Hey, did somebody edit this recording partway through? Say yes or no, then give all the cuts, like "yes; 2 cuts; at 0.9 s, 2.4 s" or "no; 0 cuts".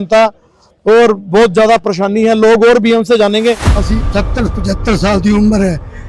yes; 1 cut; at 3.7 s